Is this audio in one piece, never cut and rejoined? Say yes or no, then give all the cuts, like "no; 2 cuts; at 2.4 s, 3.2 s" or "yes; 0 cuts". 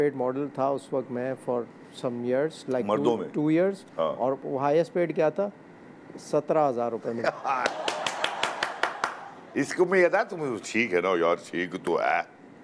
yes; 0 cuts